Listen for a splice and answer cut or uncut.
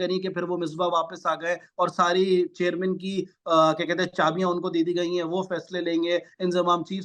uncut